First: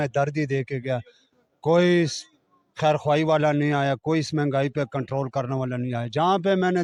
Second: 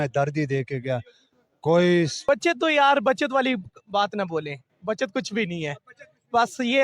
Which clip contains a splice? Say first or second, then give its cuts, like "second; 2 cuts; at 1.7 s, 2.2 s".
second; 1 cut; at 2.2 s